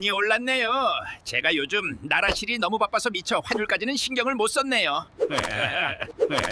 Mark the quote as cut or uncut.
uncut